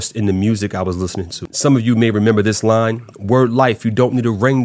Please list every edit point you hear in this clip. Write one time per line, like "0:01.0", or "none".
0:01.4